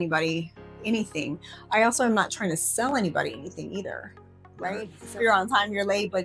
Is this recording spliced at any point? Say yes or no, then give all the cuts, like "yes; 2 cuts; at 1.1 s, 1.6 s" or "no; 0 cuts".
yes; 1 cut; at 5.2 s